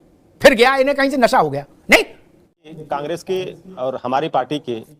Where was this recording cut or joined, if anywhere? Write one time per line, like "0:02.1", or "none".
0:02.8